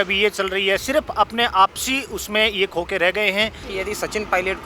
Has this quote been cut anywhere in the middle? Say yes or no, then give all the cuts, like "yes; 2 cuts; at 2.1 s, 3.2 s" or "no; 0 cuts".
yes; 1 cut; at 3.6 s